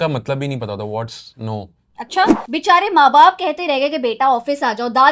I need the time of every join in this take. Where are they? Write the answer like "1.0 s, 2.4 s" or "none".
2.4 s